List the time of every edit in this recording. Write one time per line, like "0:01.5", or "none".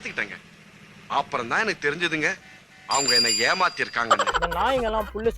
0:04.2